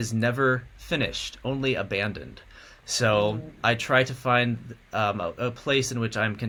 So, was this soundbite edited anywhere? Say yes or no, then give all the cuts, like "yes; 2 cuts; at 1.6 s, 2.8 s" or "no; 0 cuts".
no; 0 cuts